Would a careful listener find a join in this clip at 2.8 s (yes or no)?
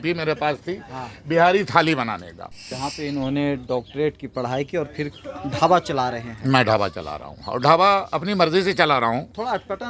yes